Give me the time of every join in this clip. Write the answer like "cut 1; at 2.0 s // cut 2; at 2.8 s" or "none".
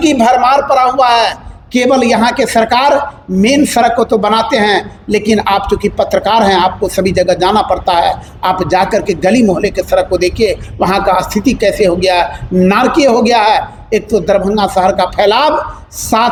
none